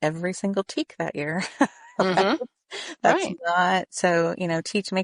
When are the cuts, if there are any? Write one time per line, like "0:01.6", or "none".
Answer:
none

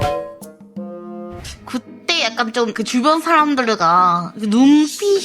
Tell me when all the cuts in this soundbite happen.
0:01.4

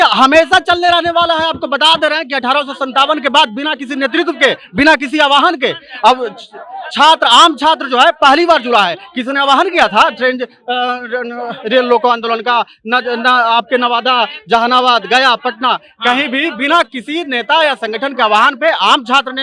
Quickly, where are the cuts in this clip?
none

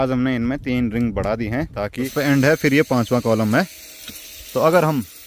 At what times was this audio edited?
0:02.0

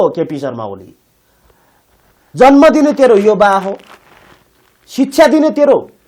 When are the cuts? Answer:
none

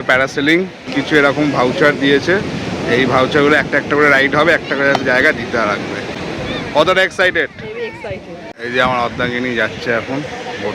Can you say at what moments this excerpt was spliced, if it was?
0:00.9
0:08.6

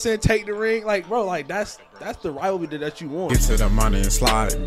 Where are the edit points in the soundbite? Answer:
0:03.3

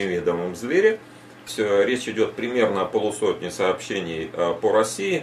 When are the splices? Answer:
0:01.5

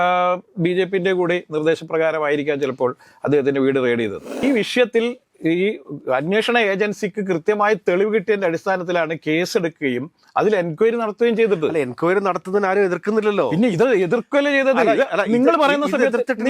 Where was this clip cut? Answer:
0:04.4

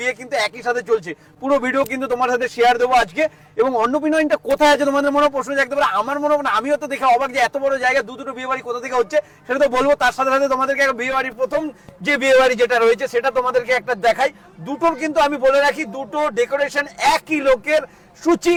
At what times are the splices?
none

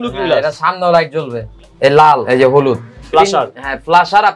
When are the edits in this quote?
0:01.5
0:03.1

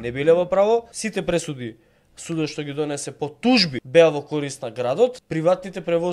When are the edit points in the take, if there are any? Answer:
0:01.0
0:03.8
0:05.2

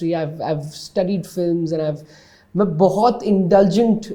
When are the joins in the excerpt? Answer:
none

